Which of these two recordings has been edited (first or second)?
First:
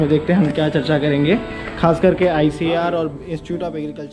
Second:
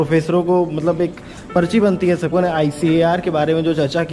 second